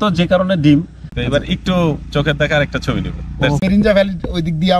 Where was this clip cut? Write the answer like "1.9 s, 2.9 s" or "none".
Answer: 1.0 s, 3.6 s